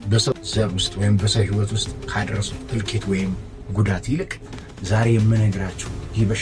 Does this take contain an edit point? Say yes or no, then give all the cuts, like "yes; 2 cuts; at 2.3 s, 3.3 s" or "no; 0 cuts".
no; 0 cuts